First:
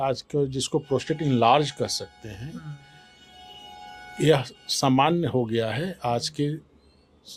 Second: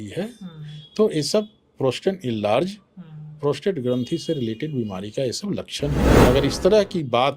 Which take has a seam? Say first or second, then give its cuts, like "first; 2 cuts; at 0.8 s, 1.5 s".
second; 1 cut; at 6.1 s